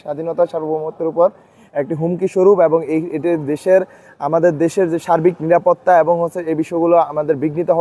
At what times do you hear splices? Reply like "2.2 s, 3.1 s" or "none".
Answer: none